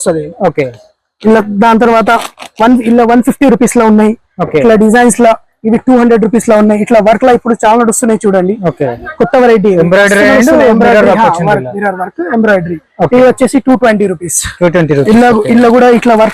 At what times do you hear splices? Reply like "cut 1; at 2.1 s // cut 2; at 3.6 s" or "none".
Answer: none